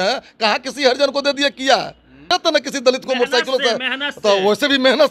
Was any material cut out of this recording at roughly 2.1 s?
yes; 1 cut; at 2.1 s

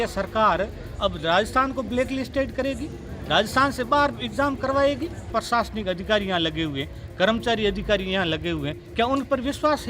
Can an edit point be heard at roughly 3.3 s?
no; 1 cut; at 5.2 s

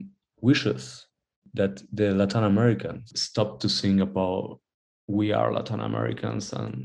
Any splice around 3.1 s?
no; 1 cut; at 1.4 s

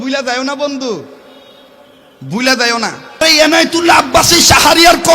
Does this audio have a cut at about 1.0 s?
no; 1 cut; at 3.2 s

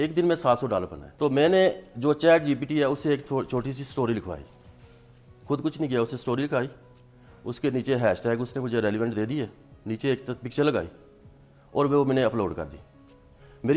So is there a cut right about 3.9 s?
no; 1 cut; at 1.1 s

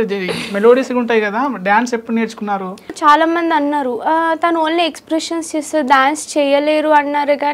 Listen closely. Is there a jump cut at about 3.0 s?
yes; 1 cut; at 3.0 s

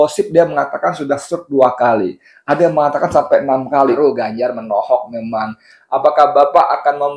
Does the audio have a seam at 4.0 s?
yes; 1 cut; at 4.0 s

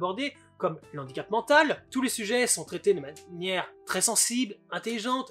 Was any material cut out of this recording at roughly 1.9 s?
yes; 1 cut; at 1.9 s

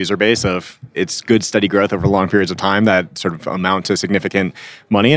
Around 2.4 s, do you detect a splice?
no; 2 cuts; at 1.0 s, 3.6 s

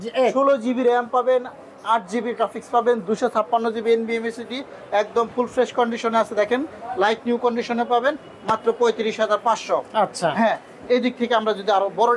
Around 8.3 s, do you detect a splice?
no; 0 cuts

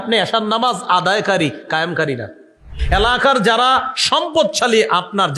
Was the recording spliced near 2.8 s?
yes; 1 cut; at 2.8 s

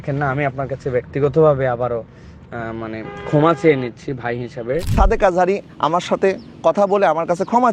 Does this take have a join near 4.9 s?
yes; 1 cut; at 4.9 s

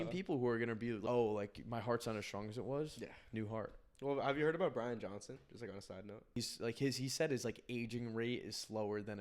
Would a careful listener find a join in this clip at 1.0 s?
yes; 2 cuts; at 1.0 s, 6.4 s

